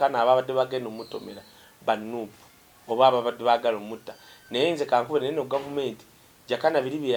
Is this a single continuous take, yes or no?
yes